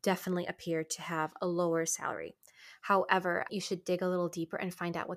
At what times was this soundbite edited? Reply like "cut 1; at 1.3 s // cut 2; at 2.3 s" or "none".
cut 1; at 3.5 s